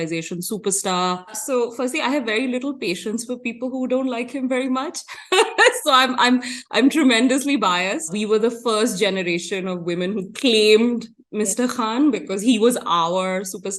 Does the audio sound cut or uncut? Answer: cut